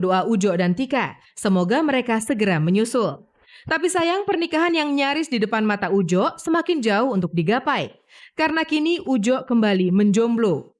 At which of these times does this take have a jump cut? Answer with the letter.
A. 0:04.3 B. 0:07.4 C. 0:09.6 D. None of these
D